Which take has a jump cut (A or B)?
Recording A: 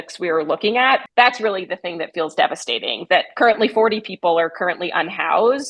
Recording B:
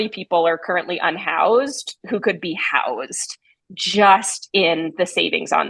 A